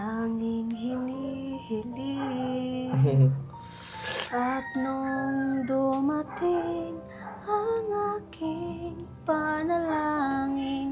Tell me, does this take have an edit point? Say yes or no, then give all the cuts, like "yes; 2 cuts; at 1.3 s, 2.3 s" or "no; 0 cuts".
no; 0 cuts